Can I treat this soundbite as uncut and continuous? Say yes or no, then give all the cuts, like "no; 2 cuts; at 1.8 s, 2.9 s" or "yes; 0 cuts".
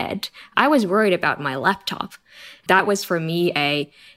no; 1 cut; at 2.8 s